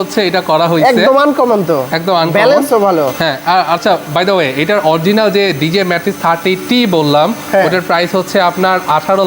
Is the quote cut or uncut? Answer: uncut